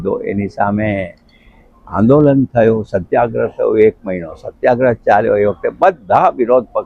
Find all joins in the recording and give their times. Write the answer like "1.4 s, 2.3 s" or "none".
none